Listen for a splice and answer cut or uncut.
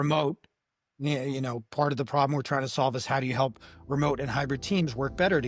uncut